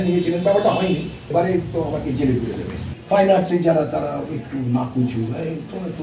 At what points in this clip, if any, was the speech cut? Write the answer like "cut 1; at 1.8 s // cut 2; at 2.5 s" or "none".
cut 1; at 1.2 s // cut 2; at 2.9 s